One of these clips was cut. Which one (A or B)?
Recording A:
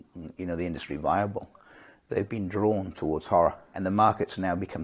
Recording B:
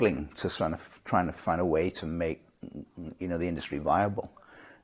A